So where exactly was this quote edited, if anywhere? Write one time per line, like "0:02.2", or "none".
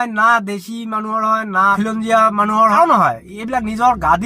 0:02.7